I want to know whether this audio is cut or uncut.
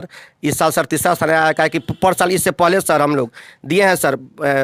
uncut